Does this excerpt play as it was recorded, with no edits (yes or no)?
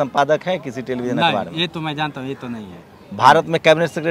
yes